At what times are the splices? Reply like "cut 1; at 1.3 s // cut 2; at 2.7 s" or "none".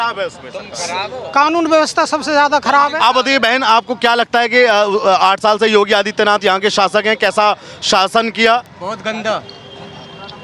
none